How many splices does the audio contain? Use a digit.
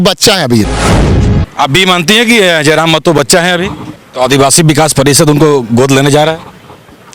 2